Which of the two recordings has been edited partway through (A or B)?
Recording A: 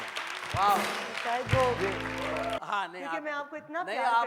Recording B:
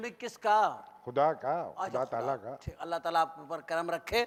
A